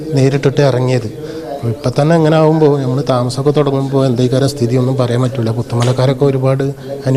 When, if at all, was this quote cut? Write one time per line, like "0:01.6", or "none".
none

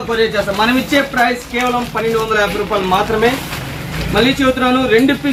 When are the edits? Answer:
none

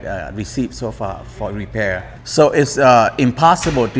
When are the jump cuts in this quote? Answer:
0:02.2

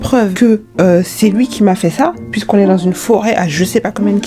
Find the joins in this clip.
none

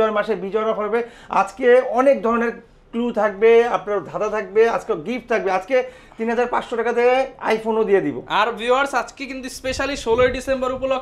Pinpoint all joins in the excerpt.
none

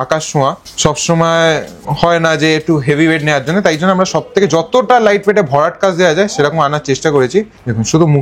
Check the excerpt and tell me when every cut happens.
none

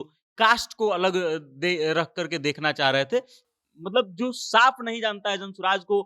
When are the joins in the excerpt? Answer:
0:03.4

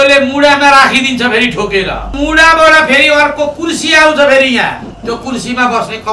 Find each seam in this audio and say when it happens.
0:02.2
0:04.9

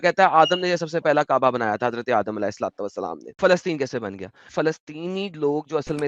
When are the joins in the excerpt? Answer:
0:03.4
0:04.5

